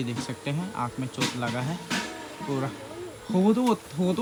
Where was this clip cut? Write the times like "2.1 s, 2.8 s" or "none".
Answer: none